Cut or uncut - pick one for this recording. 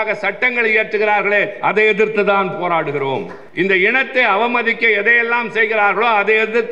cut